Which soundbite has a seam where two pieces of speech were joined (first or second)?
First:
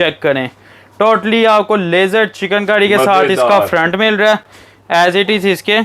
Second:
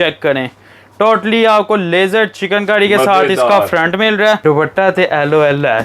second